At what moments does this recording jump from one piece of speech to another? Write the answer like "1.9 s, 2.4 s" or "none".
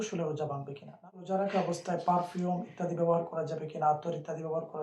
1.2 s